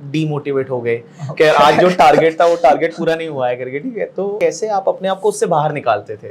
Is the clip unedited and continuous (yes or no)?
no